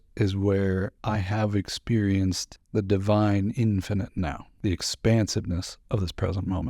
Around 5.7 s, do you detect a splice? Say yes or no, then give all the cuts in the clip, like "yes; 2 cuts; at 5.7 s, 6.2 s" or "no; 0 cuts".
no; 3 cuts; at 1.0 s, 2.5 s, 4.5 s